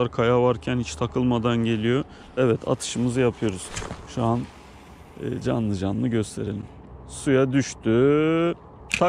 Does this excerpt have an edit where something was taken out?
no; 0 cuts

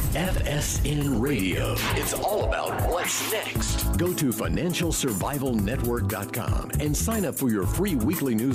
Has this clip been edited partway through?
no; 0 cuts

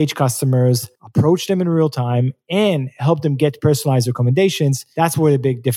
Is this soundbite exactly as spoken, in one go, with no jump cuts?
no; 2 cuts; at 0.9 s, 4.8 s

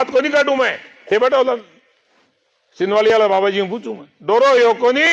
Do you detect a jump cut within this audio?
no; 0 cuts

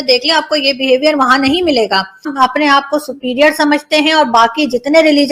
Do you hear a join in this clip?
yes; 1 cut; at 2.2 s

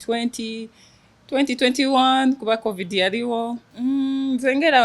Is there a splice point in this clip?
yes; 1 cut; at 3.7 s

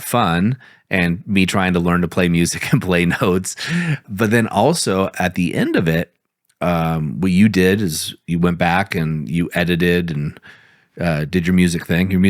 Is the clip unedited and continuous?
no; 1 cut; at 4.0 s

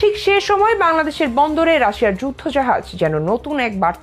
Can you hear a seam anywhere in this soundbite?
no; 0 cuts

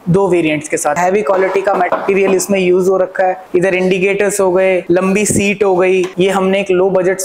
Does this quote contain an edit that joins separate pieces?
yes; 5 cuts; at 1.0 s, 1.9 s, 3.4 s, 4.8 s, 6.1 s

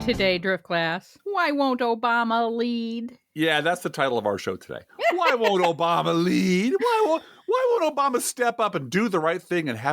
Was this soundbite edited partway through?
yes; 1 cut; at 1.1 s

